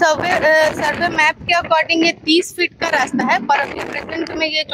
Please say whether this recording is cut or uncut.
uncut